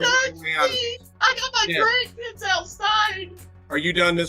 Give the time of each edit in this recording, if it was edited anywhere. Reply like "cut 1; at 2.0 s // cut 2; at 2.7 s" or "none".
cut 1; at 1.1 s // cut 2; at 3.2 s